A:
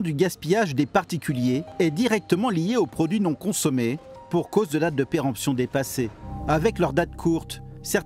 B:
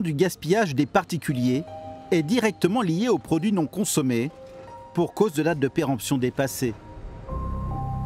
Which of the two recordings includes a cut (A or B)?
A